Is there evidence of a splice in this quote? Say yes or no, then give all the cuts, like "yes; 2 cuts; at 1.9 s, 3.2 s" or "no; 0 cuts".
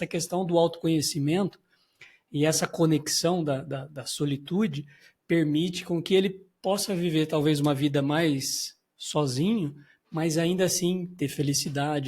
no; 0 cuts